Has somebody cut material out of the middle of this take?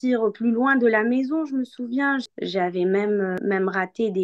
yes; 2 cuts; at 2.3 s, 3.4 s

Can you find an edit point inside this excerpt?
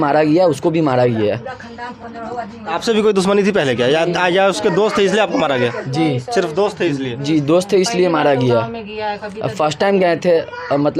no; 0 cuts

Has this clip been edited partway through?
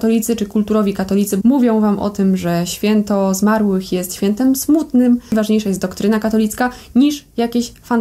yes; 2 cuts; at 1.3 s, 5.3 s

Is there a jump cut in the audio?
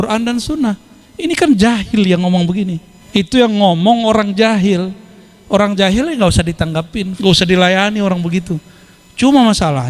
yes; 2 cuts; at 2.9 s, 7.1 s

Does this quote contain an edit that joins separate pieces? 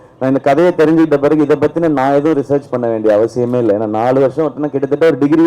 no; 0 cuts

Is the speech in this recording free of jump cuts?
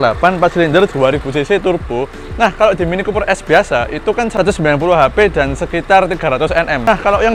yes; 0 cuts

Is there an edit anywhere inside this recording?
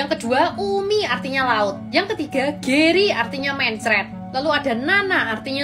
no; 0 cuts

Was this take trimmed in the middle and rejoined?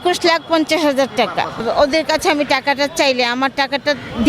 yes; 1 cut; at 1.6 s

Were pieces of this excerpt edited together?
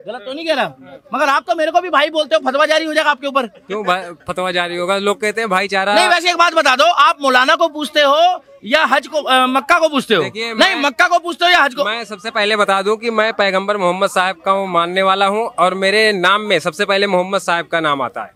no; 0 cuts

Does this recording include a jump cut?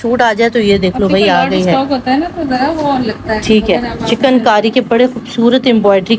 no; 0 cuts

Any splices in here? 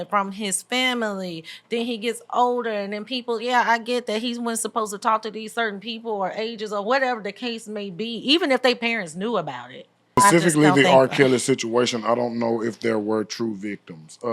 yes; 1 cut; at 10.2 s

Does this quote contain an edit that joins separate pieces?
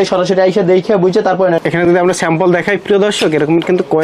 yes; 1 cut; at 1.6 s

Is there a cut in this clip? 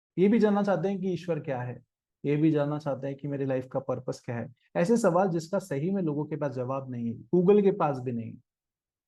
no; 0 cuts

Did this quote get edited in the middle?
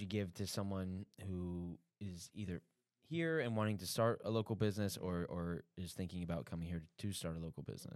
no; 0 cuts

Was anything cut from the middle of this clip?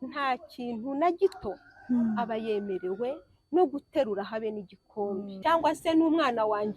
yes; 1 cut; at 5.3 s

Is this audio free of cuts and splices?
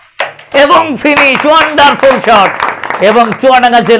no; 1 cut; at 2.3 s

